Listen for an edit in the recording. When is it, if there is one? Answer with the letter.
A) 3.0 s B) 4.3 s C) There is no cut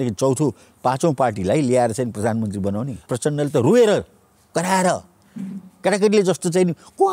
A